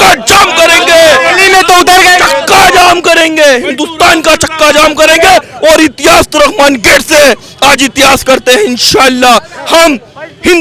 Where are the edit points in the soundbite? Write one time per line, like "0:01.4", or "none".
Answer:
none